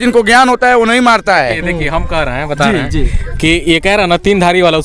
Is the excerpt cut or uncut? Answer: uncut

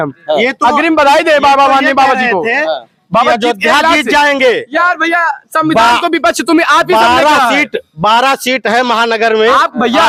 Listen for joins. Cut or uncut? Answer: uncut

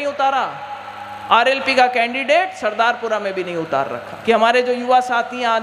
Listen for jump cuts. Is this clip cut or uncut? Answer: cut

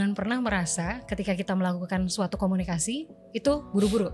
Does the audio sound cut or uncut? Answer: uncut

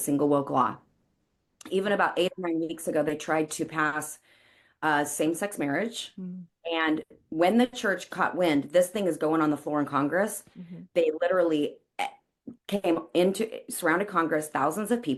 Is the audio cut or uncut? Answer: uncut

